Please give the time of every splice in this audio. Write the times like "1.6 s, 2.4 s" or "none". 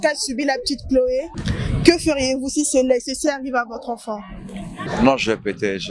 1.4 s, 4.7 s